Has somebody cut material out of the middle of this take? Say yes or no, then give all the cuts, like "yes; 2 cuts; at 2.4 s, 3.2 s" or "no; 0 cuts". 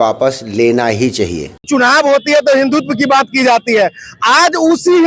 yes; 1 cut; at 1.5 s